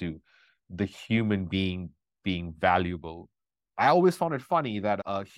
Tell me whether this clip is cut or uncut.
uncut